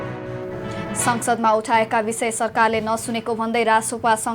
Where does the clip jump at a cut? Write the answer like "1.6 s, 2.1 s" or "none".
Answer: 1.0 s